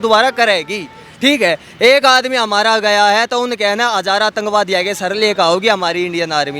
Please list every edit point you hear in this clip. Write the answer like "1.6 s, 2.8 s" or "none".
none